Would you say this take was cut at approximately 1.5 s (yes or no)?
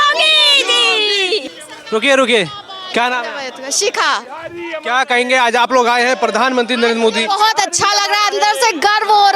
no